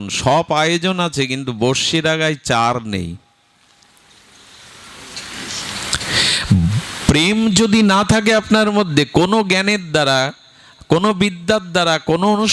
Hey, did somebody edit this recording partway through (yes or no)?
no